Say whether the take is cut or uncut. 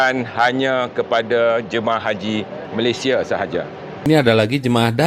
cut